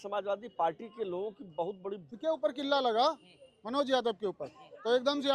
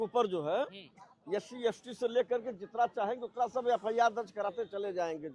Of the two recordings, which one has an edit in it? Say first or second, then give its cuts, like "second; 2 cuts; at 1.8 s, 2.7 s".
first; 1 cut; at 2.1 s